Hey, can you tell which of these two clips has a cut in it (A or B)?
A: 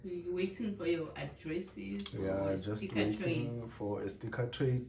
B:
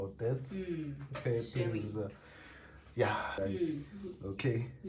B